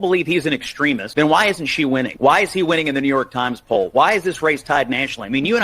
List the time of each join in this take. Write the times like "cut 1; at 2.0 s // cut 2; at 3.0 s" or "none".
cut 1; at 1.1 s // cut 2; at 2.1 s